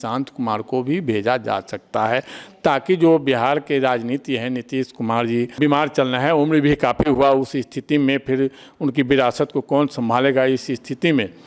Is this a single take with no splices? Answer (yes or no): yes